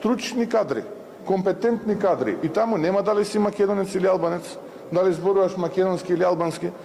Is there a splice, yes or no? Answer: no